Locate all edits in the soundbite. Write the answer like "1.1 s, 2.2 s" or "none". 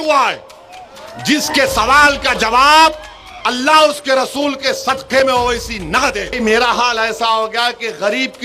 6.3 s

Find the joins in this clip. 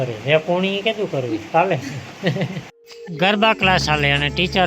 3.0 s

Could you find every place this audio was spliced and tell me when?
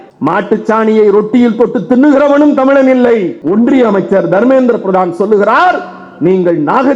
3.4 s

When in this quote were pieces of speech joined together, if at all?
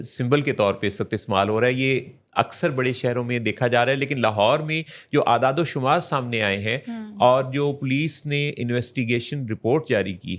none

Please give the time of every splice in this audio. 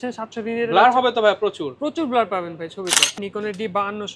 3.2 s

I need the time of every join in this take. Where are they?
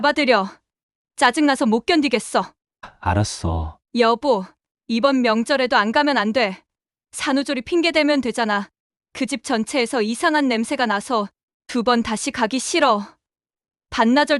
3.7 s

